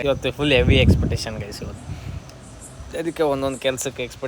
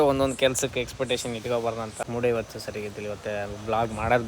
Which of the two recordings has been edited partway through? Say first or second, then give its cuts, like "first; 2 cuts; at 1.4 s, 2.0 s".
second; 1 cut; at 2.0 s